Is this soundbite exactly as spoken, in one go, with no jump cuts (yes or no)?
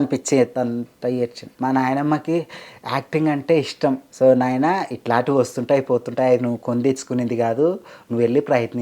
no